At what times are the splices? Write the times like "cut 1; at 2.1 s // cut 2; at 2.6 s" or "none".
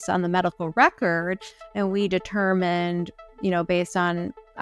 none